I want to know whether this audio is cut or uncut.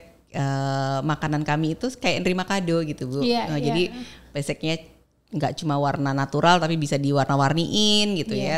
uncut